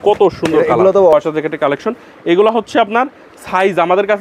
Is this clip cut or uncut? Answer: cut